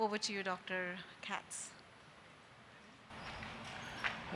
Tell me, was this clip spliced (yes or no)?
yes